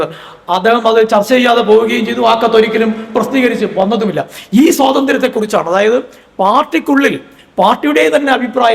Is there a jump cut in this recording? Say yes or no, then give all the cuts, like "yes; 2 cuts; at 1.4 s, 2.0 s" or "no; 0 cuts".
no; 0 cuts